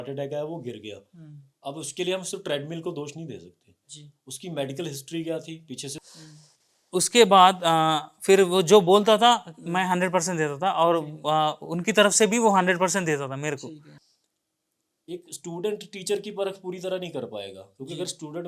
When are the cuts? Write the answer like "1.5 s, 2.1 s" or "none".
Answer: 6.1 s, 13.9 s